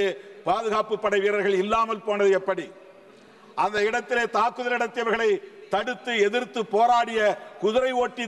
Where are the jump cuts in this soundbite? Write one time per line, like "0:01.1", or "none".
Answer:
none